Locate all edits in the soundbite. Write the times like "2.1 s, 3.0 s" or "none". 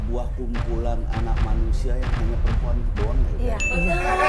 none